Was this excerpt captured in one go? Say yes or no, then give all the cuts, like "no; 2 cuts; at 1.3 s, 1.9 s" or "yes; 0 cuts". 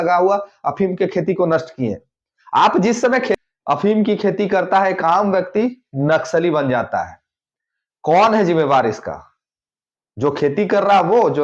no; 1 cut; at 3.4 s